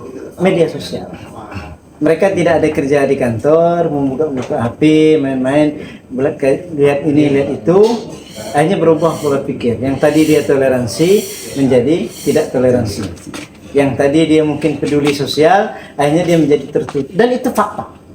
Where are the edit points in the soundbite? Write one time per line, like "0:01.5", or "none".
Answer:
none